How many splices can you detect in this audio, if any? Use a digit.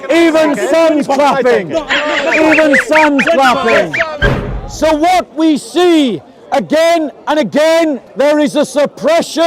2